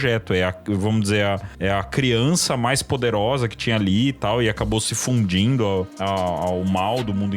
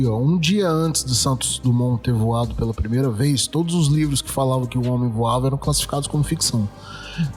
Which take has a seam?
first; 2 cuts; at 1.5 s, 5.9 s

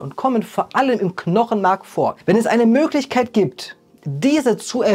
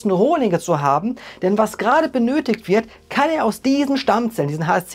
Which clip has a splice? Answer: first; 1 cut; at 2.2 s

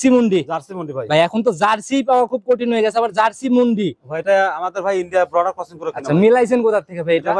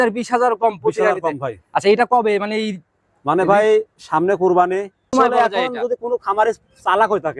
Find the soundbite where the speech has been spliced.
second; 1 cut; at 5.1 s

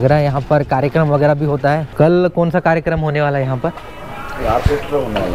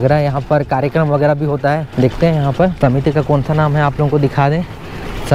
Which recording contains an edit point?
first; 1 cut; at 1.9 s

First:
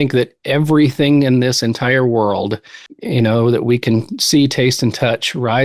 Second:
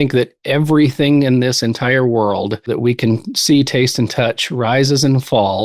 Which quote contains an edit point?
second; 1 cut; at 2.7 s

